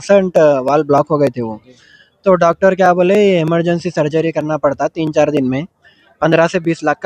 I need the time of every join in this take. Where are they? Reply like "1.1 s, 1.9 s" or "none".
none